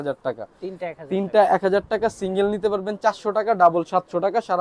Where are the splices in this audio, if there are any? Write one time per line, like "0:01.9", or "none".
none